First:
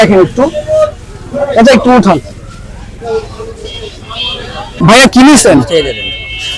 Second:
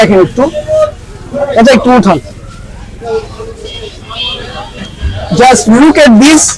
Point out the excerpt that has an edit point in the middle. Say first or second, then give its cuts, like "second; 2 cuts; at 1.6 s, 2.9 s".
first; 1 cut; at 4.7 s